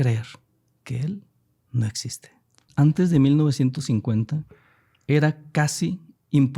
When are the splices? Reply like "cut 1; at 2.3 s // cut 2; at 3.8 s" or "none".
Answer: cut 1; at 2.6 s